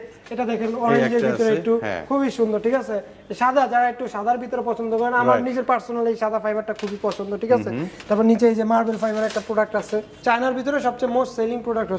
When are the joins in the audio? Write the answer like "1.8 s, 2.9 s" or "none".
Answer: 10.1 s